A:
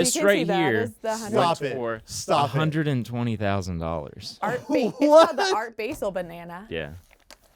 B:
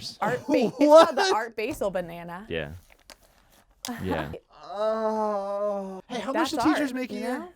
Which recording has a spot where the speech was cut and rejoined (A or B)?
B